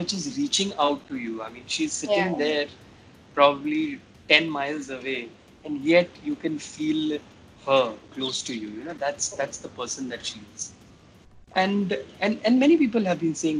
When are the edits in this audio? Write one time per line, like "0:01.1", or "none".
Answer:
none